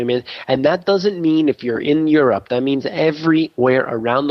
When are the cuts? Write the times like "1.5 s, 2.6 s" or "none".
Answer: none